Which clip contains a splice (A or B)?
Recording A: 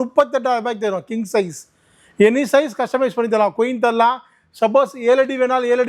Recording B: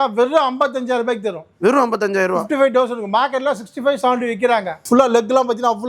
B